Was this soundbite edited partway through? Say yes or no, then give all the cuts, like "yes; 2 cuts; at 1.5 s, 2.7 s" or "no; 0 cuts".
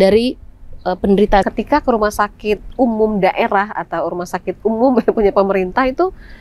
yes; 1 cut; at 1.5 s